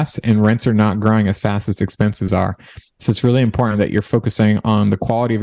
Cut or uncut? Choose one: uncut